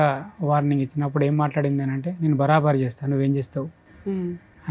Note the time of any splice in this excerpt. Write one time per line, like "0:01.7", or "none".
none